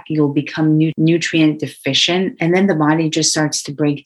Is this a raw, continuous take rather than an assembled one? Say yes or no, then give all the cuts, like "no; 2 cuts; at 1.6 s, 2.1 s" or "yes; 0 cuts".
no; 2 cuts; at 0.9 s, 2.4 s